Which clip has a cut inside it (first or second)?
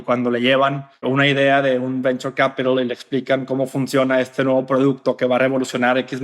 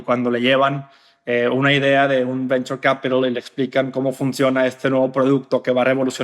first